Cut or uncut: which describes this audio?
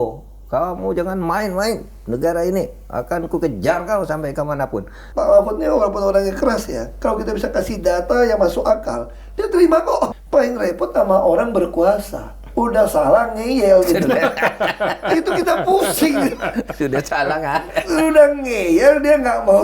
cut